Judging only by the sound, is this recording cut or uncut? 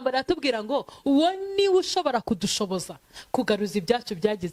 uncut